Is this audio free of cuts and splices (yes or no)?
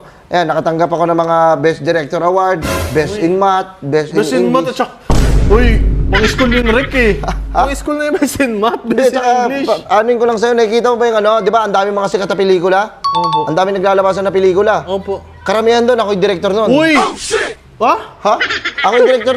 yes